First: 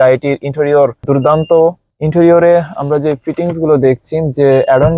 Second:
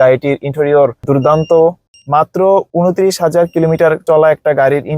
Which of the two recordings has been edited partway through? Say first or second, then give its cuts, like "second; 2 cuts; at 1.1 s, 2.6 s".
second; 1 cut; at 1.9 s